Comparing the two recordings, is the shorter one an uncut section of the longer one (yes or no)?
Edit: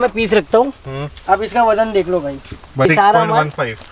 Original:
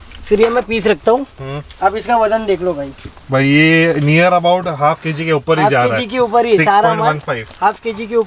no